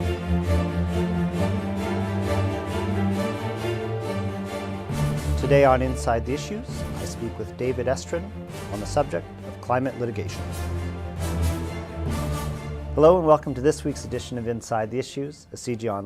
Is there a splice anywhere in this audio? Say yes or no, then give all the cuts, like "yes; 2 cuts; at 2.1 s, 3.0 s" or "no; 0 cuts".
no; 0 cuts